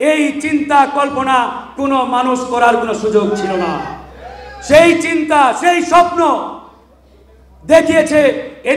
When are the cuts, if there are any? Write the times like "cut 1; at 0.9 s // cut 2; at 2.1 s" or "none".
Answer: none

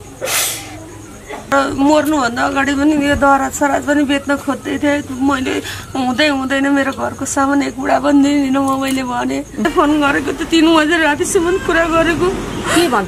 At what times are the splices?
cut 1; at 1.5 s // cut 2; at 9.6 s

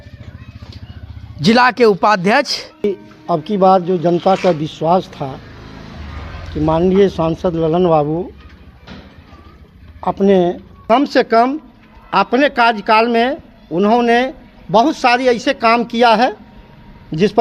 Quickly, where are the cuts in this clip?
cut 1; at 2.9 s // cut 2; at 10.7 s

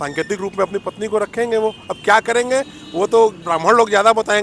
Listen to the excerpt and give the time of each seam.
none

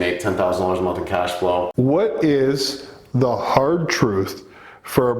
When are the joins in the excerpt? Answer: cut 1; at 1.7 s

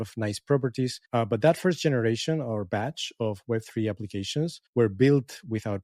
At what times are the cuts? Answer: cut 1; at 1.1 s // cut 2; at 4.6 s

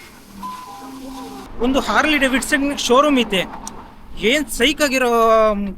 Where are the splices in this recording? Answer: cut 1; at 1.4 s

